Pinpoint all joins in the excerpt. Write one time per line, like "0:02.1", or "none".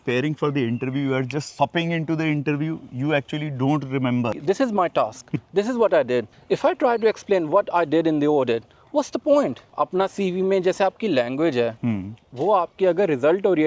0:04.4
0:06.3
0:09.7